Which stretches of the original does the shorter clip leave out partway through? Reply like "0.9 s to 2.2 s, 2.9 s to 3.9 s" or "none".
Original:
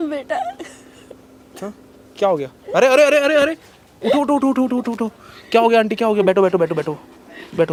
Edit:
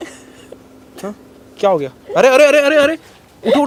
none